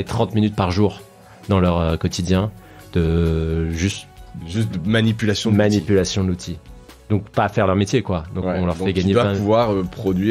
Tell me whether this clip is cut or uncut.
uncut